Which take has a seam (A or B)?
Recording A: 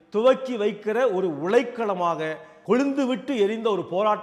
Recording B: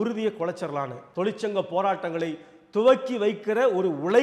B